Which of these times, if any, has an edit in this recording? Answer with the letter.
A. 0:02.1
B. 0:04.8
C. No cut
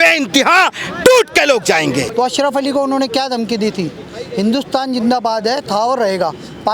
A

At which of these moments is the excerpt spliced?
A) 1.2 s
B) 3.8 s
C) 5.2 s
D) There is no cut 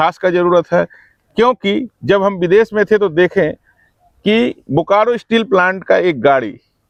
D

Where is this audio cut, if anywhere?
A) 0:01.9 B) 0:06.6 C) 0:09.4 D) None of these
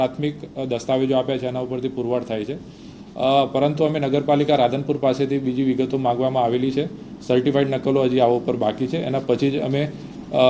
D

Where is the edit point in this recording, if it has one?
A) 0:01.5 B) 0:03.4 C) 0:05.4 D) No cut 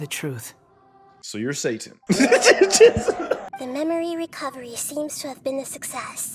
B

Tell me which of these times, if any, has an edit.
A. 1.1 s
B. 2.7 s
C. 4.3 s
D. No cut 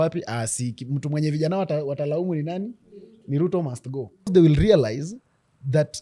C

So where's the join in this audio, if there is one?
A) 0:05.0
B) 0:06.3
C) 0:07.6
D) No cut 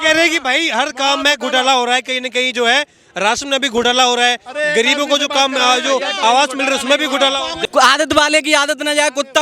C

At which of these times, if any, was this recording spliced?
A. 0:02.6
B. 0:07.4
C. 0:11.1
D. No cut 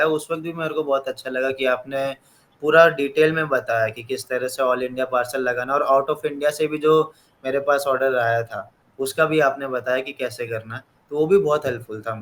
D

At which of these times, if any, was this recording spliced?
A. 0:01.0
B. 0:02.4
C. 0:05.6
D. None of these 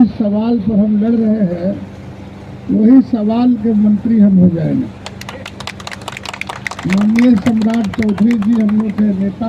C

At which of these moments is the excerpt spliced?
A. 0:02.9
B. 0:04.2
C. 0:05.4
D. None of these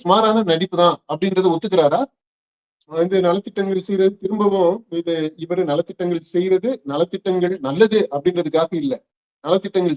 A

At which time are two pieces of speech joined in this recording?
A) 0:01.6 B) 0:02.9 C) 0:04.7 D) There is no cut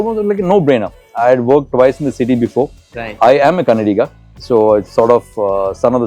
D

